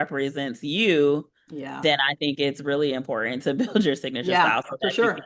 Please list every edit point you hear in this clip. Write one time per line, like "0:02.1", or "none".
none

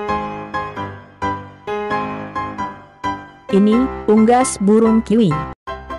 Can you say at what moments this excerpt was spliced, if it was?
none

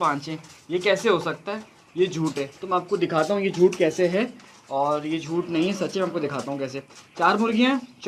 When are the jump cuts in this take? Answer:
none

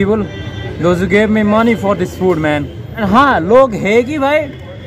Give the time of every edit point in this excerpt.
0:03.0

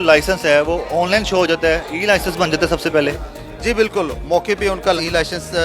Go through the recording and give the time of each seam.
none

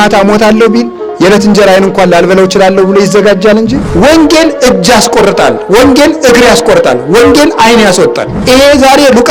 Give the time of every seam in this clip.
0:01.0
0:04.1
0:08.3

